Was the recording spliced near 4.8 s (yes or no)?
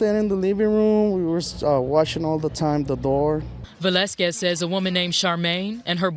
no